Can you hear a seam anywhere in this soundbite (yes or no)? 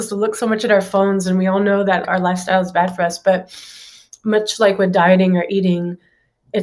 yes